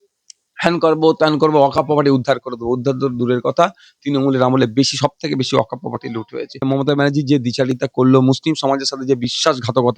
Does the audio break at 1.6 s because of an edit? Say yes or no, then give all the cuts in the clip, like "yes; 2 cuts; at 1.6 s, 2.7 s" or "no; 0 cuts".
no; 1 cut; at 6.6 s